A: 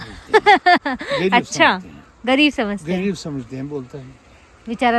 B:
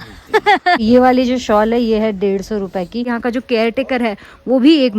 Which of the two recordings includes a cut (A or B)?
B